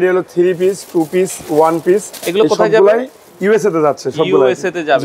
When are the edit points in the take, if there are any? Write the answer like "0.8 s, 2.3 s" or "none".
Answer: none